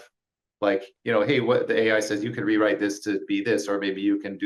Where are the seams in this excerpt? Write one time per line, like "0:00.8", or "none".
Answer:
0:00.9